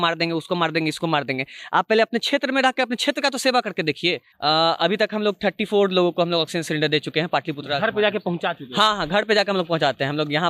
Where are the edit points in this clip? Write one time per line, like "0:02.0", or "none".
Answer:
0:04.3